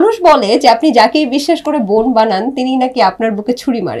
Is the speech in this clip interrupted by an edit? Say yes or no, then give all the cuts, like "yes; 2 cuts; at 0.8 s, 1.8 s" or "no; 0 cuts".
no; 0 cuts